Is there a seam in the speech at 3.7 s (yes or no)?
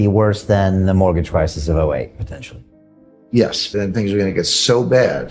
yes